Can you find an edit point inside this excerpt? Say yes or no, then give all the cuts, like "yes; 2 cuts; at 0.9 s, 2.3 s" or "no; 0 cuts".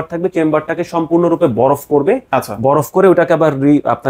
no; 0 cuts